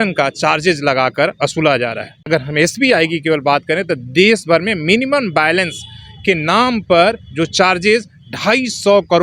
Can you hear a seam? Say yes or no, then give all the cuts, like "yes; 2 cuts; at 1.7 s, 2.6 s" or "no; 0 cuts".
yes; 1 cut; at 2.3 s